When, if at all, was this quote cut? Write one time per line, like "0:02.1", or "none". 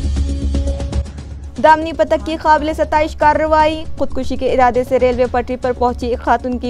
0:01.0